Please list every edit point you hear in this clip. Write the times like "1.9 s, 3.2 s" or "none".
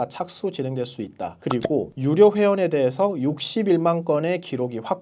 none